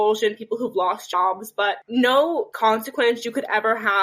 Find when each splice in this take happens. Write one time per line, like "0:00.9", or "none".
0:01.8
0:02.5